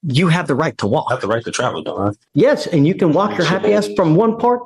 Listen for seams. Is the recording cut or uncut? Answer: cut